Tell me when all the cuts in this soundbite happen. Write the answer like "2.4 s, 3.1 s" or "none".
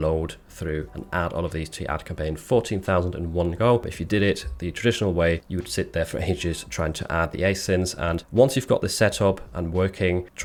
none